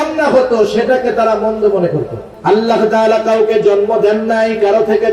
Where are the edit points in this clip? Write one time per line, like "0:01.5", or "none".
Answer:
0:02.2